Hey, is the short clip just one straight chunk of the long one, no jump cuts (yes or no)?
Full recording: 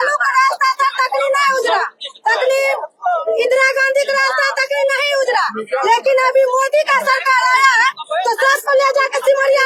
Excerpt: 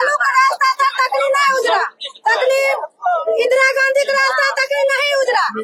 yes